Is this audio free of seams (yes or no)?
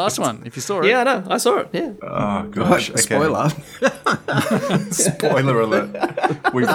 no